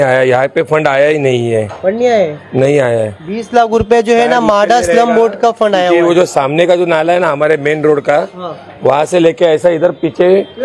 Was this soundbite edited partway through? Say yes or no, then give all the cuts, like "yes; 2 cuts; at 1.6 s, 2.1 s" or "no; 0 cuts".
no; 0 cuts